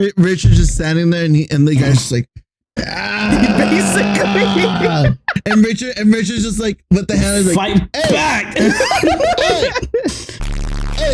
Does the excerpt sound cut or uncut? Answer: uncut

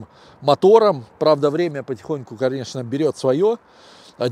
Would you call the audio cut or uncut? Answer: uncut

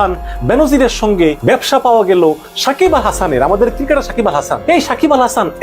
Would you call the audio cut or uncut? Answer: cut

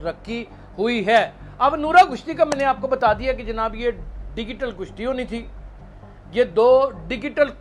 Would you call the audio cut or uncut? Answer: uncut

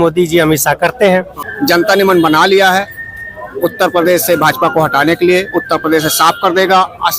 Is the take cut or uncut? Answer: cut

